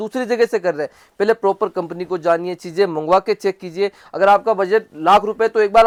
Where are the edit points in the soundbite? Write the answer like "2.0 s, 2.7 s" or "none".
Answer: none